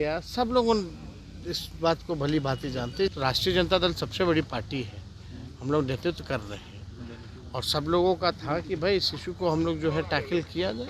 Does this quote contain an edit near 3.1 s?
yes; 1 cut; at 3.1 s

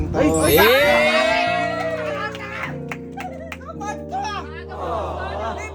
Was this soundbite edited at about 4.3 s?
no; 0 cuts

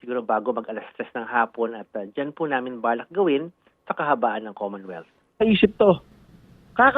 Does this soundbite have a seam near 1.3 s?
no; 1 cut; at 5.4 s

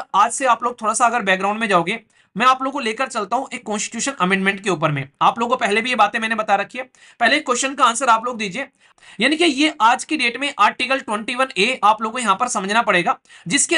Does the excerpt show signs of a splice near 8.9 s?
yes; 1 cut; at 8.9 s

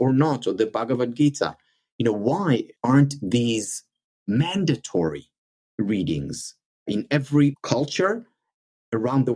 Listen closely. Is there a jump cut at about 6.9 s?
yes; 3 cuts; at 2.7 s, 6.9 s, 7.6 s

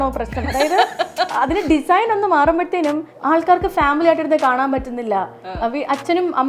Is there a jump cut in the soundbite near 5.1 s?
no; 2 cuts; at 1.3 s, 3.1 s

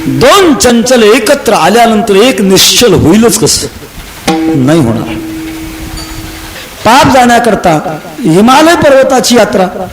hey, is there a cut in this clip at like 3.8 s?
no; 1 cut; at 6.6 s

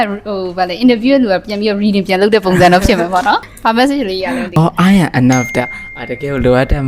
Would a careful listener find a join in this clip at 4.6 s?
yes; 2 cuts; at 3.5 s, 4.6 s

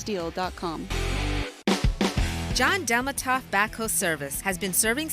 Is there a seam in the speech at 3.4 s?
no; 1 cut; at 1.5 s

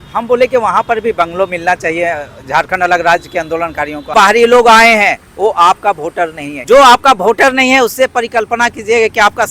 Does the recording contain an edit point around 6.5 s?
yes; 2 cuts; at 4.1 s, 6.5 s

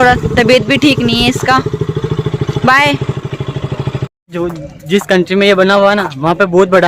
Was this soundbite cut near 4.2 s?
yes; 1 cut; at 4.2 s

